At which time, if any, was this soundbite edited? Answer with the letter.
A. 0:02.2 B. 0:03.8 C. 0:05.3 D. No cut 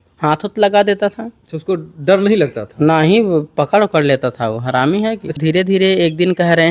C